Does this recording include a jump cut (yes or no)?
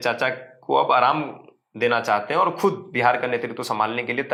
no